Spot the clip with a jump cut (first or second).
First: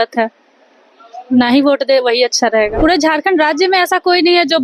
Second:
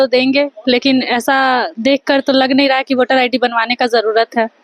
first